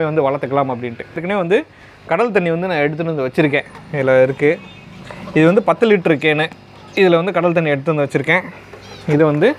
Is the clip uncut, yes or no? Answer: no